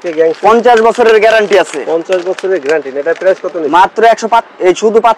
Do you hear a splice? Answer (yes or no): no